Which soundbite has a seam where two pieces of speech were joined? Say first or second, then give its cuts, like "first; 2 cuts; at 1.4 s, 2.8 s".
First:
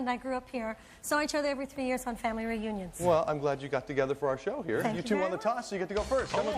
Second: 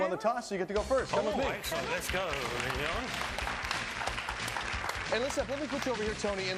first; 1 cut; at 1.0 s